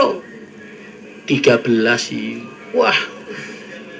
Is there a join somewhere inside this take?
no; 0 cuts

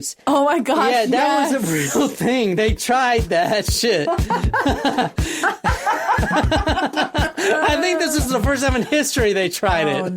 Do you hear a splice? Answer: no; 0 cuts

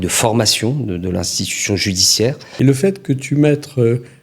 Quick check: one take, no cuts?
no; 1 cut; at 2.4 s

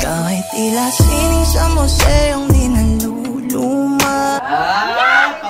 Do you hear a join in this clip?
no; 0 cuts

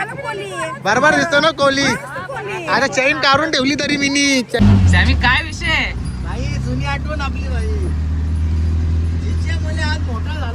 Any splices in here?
yes; 1 cut; at 4.6 s

